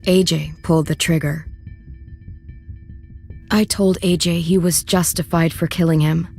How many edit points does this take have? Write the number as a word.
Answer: one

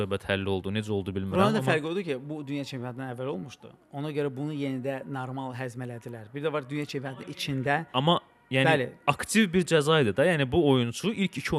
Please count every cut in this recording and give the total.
zero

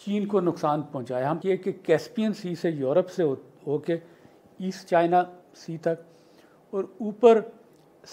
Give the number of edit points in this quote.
one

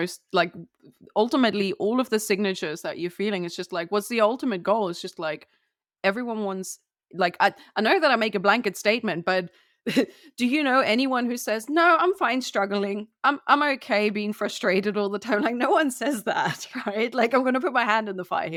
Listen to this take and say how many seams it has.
zero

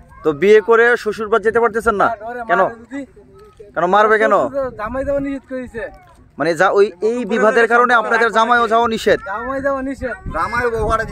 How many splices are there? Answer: zero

